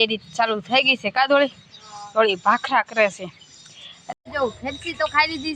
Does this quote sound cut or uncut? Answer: cut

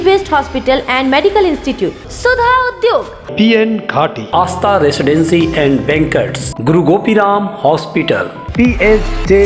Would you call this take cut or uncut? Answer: uncut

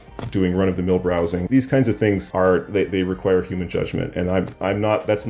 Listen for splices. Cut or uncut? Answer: cut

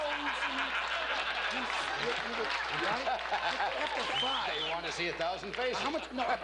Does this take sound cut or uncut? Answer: cut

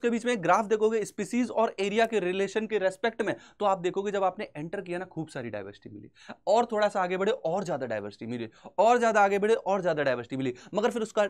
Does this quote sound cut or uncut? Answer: uncut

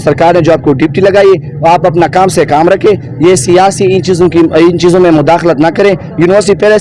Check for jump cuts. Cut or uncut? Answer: uncut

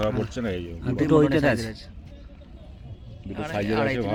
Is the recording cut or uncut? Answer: uncut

